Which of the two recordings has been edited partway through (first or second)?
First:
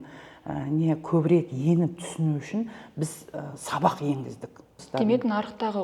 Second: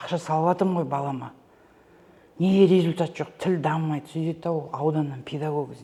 first